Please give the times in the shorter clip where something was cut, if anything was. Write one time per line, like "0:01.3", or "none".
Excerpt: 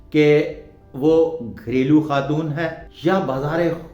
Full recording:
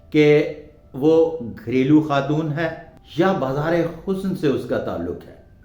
0:02.8